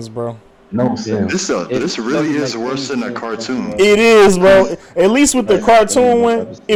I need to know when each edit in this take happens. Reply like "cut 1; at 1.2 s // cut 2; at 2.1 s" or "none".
none